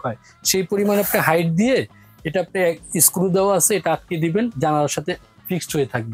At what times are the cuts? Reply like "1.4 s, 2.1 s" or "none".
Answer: none